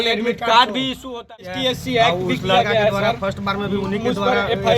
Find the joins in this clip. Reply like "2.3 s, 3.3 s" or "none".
1.6 s